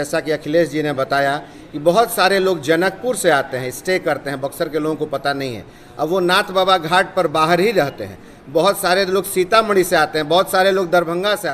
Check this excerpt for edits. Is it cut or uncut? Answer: uncut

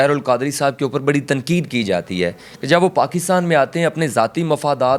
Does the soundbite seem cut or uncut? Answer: uncut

